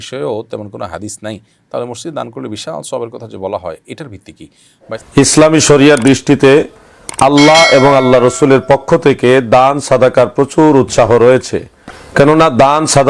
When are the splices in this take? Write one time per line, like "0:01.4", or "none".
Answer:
0:05.0